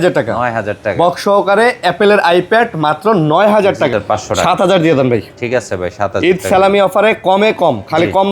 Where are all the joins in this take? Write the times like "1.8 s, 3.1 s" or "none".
3.9 s